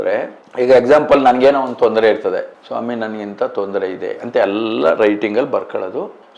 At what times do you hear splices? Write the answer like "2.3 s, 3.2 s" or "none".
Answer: none